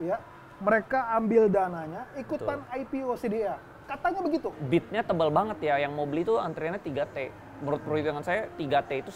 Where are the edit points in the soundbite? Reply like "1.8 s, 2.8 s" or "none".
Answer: 4.5 s